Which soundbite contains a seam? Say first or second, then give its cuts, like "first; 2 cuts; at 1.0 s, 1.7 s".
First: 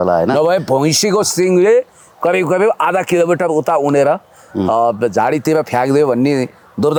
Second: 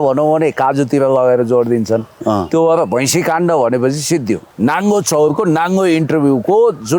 second; 1 cut; at 4.5 s